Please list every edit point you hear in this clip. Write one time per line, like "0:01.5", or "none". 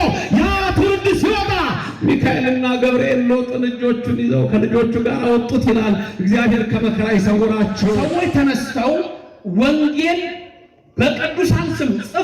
0:08.0